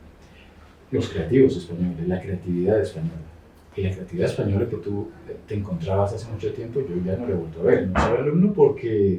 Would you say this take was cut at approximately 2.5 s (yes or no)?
no